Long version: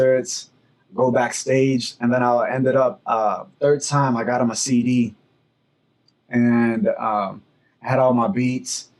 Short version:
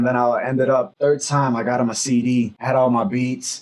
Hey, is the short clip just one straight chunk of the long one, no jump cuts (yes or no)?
no